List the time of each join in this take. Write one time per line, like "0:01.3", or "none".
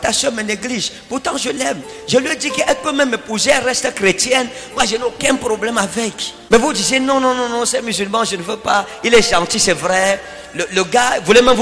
0:06.3